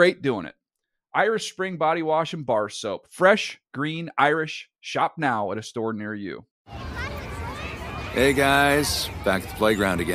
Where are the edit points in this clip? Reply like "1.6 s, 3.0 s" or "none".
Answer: 6.4 s